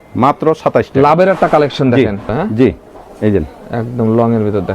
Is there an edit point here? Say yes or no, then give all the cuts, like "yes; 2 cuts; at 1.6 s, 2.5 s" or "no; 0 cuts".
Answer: yes; 1 cut; at 2.3 s